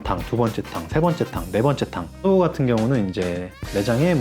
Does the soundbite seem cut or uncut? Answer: cut